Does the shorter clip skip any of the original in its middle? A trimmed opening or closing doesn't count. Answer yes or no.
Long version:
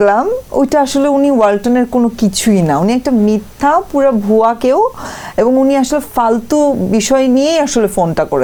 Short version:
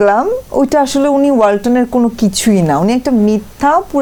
no